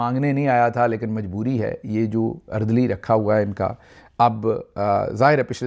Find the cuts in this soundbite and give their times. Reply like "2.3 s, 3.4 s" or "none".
none